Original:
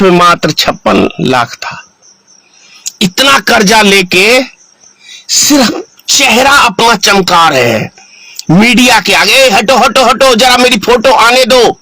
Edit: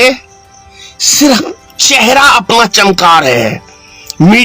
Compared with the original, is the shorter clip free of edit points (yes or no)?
yes